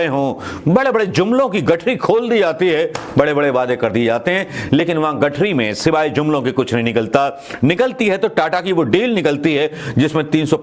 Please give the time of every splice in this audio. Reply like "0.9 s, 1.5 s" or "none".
none